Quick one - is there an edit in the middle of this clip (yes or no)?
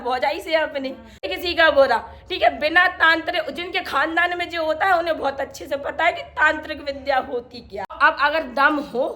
yes